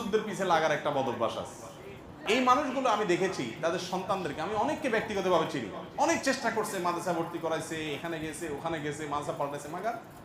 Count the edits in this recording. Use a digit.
1